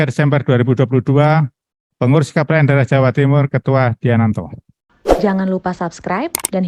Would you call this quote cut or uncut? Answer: cut